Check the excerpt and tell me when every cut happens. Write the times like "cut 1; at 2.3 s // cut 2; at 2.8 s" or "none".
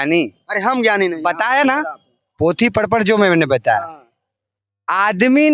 none